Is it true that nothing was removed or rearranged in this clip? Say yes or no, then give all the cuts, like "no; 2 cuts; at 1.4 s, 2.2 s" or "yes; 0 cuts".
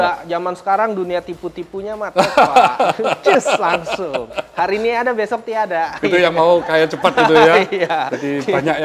yes; 0 cuts